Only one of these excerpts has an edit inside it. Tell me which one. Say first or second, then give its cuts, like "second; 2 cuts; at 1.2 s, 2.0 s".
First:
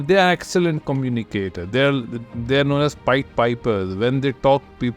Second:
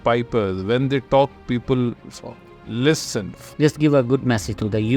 second; 1 cut; at 3.4 s